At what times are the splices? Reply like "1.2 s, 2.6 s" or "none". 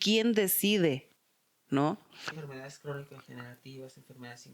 2.3 s

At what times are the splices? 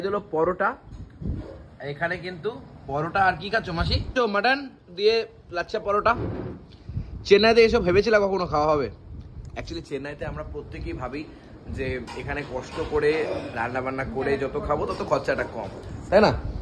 4.0 s

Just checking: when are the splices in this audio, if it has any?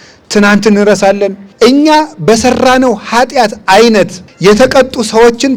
1.4 s, 4.2 s

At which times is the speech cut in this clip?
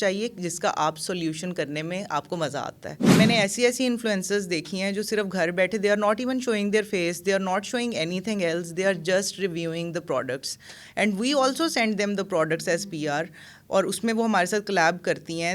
3.1 s

